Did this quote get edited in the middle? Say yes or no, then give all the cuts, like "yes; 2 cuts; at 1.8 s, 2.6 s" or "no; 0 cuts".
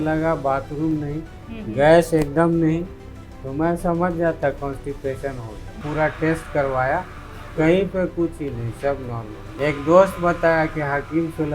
yes; 2 cuts; at 5.8 s, 9.5 s